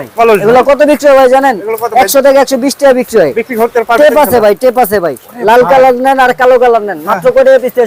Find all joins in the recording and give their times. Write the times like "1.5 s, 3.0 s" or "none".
none